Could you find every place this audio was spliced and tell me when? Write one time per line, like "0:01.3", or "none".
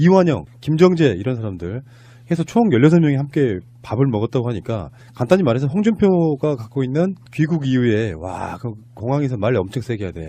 0:06.1